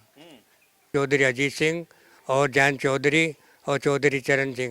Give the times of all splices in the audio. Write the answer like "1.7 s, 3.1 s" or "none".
0.9 s

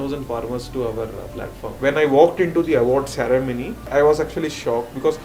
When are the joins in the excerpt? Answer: 1.7 s, 3.7 s

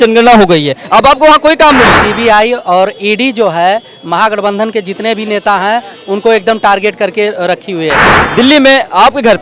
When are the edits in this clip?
2.0 s, 8.1 s

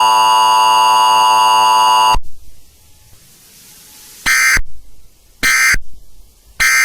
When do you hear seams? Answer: 2.1 s

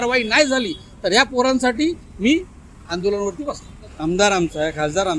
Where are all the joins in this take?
3.8 s

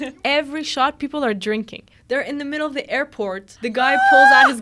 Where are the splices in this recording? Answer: 1.9 s, 3.5 s

